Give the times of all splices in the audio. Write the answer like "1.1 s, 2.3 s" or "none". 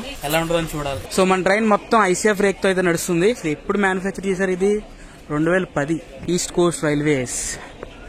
none